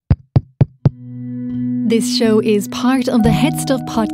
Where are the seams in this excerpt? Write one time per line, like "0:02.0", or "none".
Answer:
0:01.9